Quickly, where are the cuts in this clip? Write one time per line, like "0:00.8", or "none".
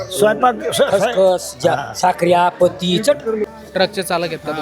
0:03.5

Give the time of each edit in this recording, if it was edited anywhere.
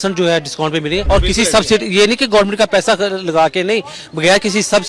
0:01.0

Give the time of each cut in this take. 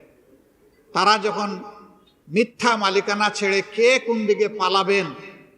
none

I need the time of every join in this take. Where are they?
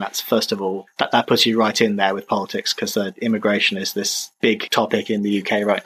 0:04.4

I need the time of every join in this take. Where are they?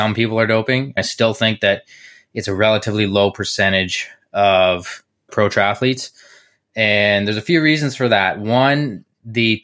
0:01.0
0:05.3

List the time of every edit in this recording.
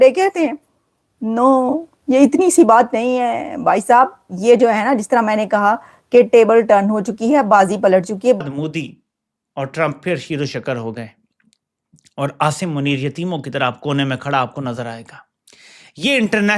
0:08.4

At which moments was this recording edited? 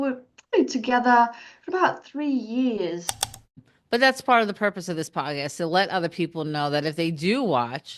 0:03.4

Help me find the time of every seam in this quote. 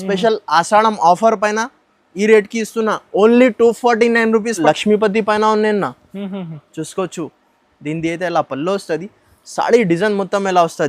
0:04.6

